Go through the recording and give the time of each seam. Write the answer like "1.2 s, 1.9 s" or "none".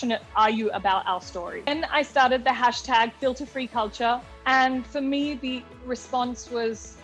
1.7 s